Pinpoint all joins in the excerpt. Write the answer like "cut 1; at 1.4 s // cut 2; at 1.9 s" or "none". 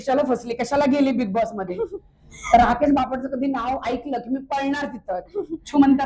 none